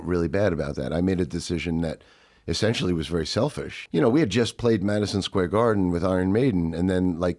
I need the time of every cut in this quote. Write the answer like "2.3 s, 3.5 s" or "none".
3.7 s

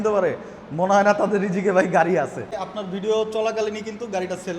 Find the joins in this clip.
2.5 s

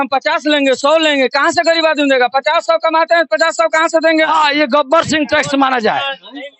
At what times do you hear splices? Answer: 4.3 s

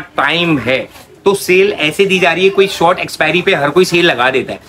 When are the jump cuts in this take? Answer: none

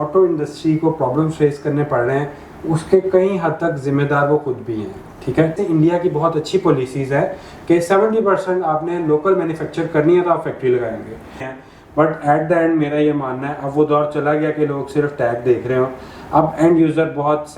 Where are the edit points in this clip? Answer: 5.5 s, 11.5 s

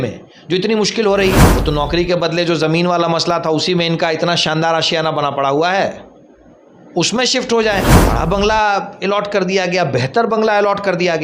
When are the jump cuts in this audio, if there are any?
1.5 s, 8.0 s

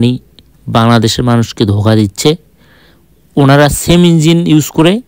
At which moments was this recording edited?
none

